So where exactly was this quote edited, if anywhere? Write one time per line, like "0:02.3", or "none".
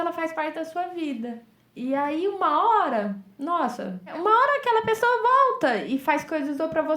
0:04.2